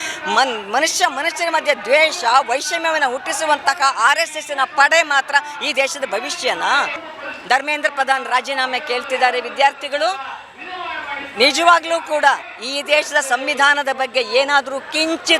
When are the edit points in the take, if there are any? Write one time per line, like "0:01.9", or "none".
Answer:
0:07.0